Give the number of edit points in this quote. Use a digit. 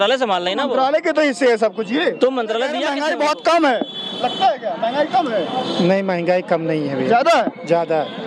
1